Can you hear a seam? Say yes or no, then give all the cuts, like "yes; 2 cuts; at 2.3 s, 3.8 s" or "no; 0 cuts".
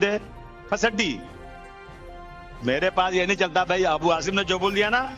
yes; 2 cuts; at 1.3 s, 2.6 s